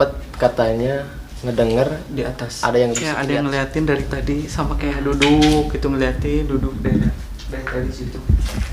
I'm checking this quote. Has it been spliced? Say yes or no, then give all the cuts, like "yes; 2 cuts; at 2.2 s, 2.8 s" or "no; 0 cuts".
yes; 1 cut; at 3.2 s